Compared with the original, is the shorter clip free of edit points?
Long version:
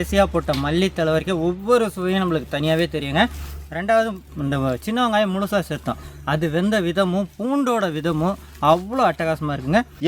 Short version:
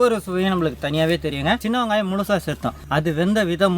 no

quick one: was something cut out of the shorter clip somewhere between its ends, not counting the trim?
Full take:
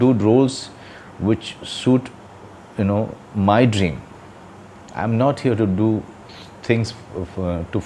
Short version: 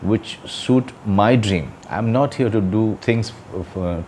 yes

